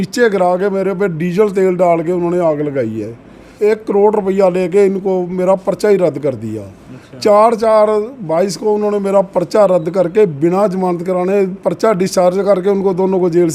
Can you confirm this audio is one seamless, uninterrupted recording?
no; 1 cut; at 3.5 s

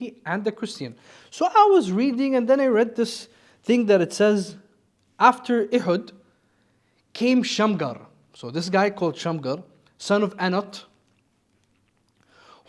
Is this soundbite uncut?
yes; 0 cuts

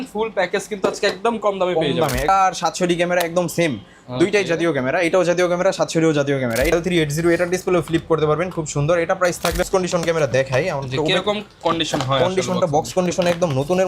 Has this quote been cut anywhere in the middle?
yes; 3 cuts; at 2.3 s, 6.7 s, 9.6 s

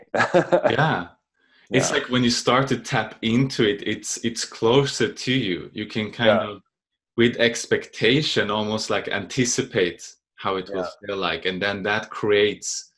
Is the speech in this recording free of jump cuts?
yes; 0 cuts

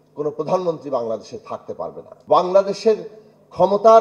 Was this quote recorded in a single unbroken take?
no; 1 cut; at 2.1 s

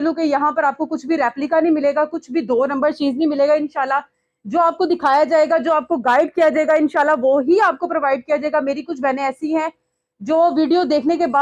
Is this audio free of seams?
yes; 0 cuts

